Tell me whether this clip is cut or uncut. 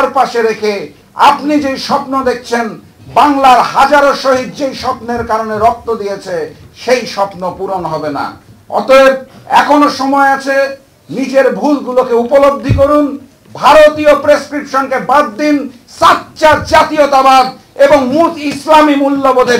uncut